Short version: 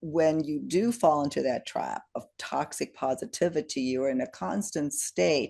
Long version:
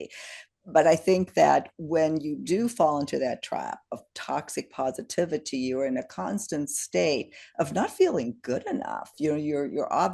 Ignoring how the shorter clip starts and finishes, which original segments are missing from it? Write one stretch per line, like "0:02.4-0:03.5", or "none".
none